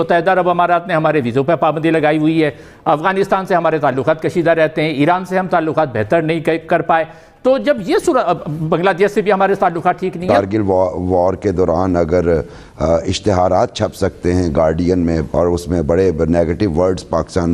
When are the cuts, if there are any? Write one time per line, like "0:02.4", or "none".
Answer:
0:10.2
0:15.3